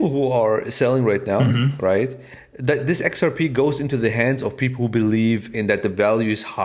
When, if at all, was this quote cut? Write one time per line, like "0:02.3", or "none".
none